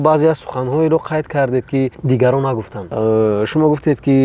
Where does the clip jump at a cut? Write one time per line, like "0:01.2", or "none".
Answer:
0:02.0
0:02.8